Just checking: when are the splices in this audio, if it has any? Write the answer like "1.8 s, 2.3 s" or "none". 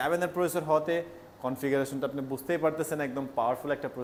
none